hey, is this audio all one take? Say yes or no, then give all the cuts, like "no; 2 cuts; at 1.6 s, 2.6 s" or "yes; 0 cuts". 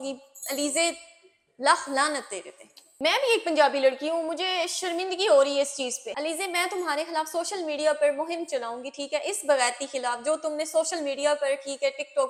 yes; 0 cuts